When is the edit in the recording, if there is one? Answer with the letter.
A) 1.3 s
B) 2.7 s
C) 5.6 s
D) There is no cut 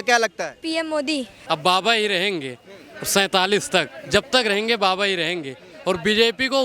A